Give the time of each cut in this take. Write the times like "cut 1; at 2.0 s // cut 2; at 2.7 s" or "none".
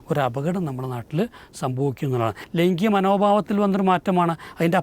cut 1; at 2.4 s